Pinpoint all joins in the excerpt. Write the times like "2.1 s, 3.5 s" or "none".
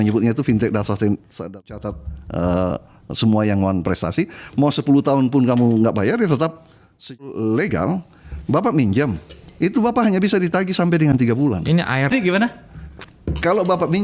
1.6 s, 7.1 s